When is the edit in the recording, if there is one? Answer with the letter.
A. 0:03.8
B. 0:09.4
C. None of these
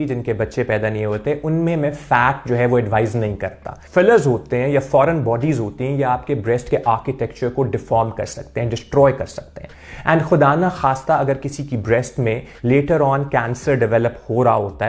A